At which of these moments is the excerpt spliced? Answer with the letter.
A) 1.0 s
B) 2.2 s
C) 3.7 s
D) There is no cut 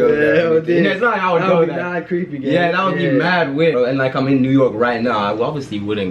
C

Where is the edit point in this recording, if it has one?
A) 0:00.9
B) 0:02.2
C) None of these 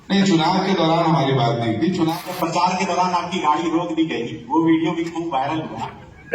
B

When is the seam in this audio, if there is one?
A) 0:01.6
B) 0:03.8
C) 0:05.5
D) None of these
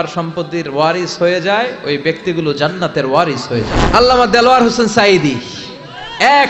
B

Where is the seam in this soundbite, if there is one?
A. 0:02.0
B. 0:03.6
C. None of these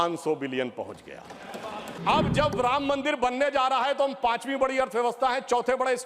A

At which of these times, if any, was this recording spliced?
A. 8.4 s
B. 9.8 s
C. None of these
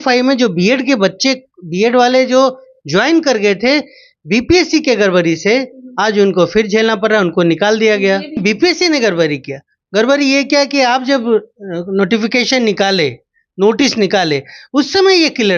A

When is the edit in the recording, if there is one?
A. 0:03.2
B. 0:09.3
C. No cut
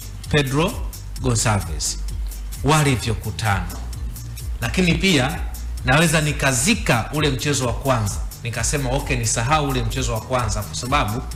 C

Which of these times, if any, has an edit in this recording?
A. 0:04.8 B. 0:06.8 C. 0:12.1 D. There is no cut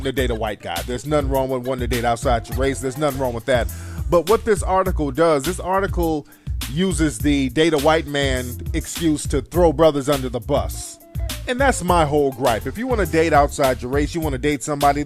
A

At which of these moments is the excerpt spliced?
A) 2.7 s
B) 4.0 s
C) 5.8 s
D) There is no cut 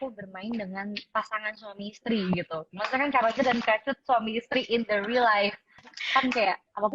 C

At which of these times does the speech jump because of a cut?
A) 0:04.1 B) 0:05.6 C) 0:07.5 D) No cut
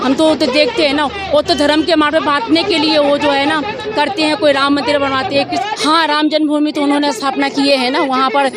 B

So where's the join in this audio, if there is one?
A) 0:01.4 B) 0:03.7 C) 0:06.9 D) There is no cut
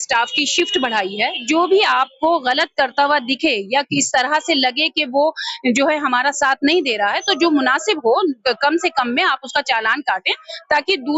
A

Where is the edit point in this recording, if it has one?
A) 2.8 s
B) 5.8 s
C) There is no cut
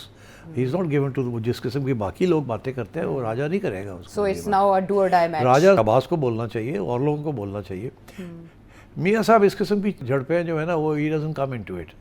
B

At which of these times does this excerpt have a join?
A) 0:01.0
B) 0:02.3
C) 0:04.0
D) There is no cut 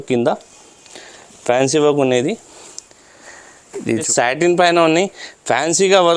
C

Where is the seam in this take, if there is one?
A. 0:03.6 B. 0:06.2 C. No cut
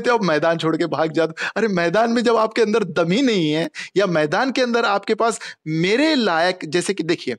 C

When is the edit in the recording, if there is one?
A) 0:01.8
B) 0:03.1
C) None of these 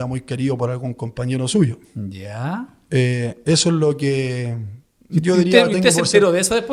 C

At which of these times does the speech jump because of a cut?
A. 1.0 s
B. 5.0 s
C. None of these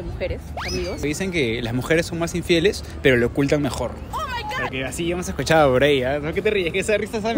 A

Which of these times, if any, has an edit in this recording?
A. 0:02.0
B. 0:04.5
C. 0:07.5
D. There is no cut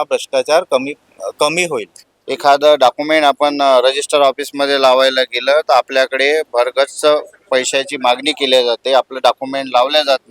A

